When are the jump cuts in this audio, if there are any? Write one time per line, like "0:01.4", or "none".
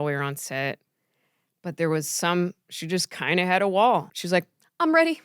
0:04.1

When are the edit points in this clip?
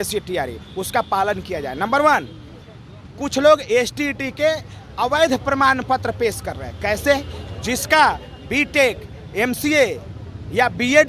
none

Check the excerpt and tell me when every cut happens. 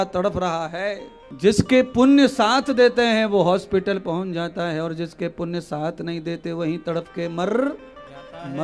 none

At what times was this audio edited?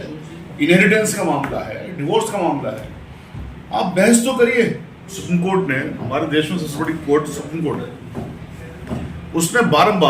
0:05.2

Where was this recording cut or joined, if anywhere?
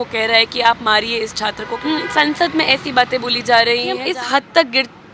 0:01.8
0:04.0

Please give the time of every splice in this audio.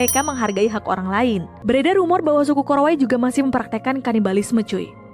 0:01.5

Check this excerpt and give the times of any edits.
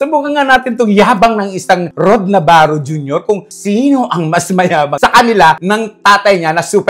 none

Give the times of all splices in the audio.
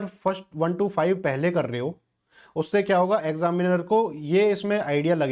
none

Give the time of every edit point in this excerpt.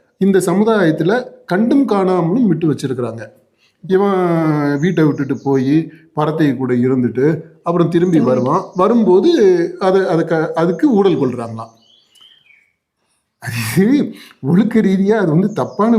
0:03.7

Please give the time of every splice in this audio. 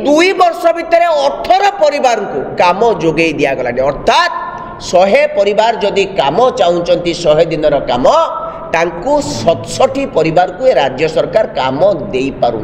none

